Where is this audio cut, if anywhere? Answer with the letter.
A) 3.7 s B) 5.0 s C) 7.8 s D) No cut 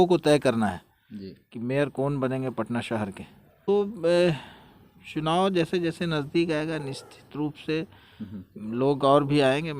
A